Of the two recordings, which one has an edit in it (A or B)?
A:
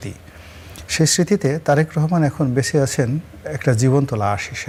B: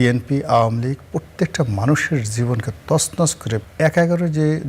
B